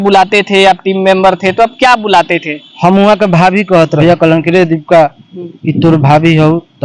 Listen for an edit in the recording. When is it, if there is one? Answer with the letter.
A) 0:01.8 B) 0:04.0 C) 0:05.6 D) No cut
B